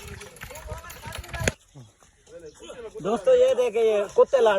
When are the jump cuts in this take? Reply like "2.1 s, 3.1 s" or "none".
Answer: 1.6 s